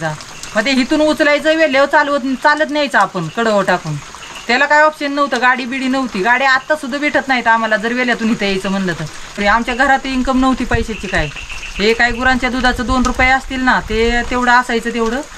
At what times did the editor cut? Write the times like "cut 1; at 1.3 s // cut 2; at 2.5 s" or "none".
none